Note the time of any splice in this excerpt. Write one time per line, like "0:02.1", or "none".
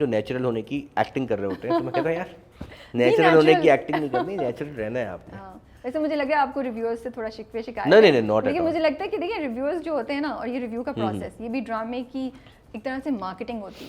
none